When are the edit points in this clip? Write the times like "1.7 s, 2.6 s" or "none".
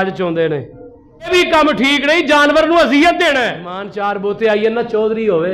1.3 s, 3.8 s